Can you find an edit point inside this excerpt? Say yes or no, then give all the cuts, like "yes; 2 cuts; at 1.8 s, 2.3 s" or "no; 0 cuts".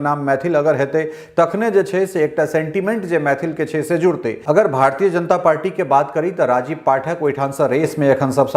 yes; 1 cut; at 4.4 s